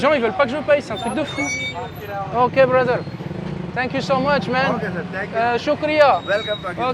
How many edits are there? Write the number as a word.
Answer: zero